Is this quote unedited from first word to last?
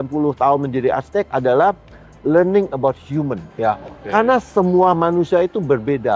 yes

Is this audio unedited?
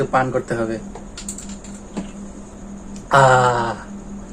no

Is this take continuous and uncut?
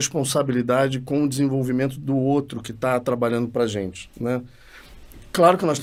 yes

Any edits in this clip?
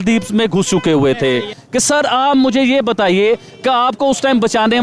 yes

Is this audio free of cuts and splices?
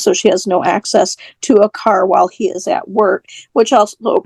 yes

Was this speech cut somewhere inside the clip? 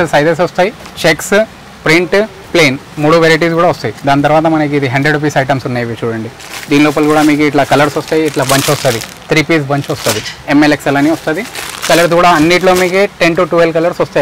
no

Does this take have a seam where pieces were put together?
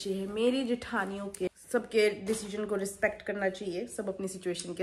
yes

